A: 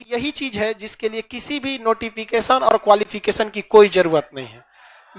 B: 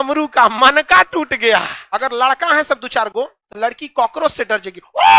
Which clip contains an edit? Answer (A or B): B